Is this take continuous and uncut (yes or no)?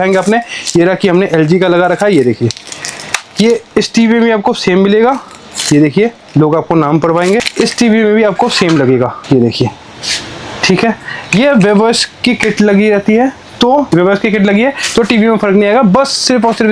yes